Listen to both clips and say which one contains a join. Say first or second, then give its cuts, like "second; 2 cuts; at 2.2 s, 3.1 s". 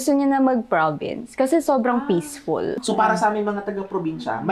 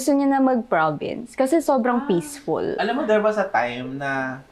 first; 1 cut; at 2.8 s